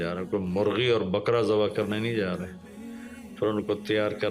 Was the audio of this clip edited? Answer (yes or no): no